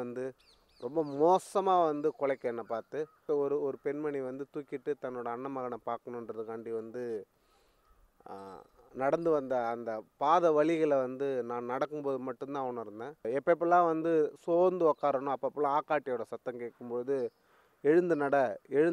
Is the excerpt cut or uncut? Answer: cut